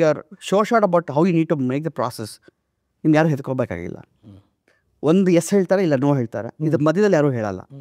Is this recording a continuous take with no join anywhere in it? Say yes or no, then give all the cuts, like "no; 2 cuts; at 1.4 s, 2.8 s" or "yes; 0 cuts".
yes; 0 cuts